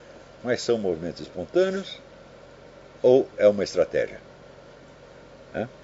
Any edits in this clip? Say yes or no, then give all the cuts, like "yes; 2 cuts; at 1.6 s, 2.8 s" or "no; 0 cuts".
no; 0 cuts